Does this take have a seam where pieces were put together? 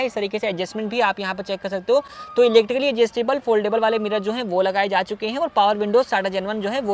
no; 0 cuts

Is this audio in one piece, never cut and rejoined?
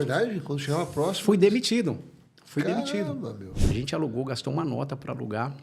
no; 1 cut; at 3.6 s

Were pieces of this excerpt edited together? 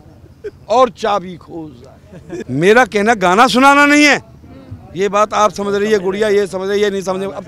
yes; 1 cut; at 2.3 s

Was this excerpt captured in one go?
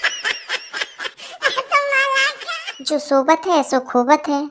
yes; 0 cuts

